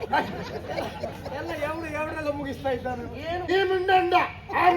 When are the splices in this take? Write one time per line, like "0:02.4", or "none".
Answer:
0:03.4